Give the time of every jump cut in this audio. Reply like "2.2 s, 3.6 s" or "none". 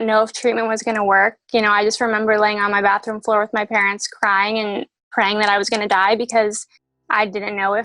4.9 s